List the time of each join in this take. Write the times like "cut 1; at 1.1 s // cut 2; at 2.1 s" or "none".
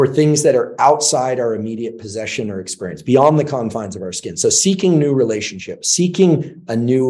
none